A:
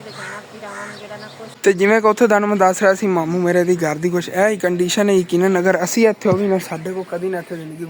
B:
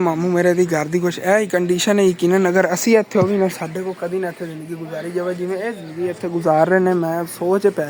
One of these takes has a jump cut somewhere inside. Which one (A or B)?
A